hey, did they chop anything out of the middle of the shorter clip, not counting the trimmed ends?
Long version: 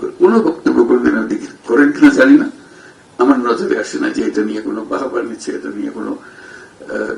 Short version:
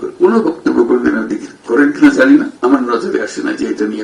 yes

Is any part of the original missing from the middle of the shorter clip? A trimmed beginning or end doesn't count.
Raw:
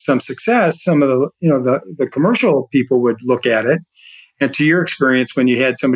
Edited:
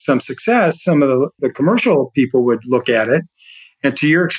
yes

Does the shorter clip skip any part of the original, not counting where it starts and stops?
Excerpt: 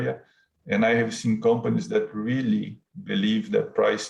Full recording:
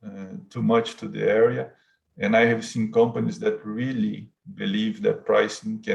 no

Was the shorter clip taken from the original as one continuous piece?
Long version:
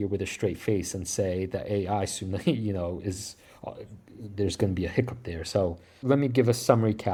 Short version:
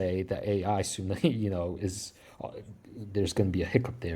yes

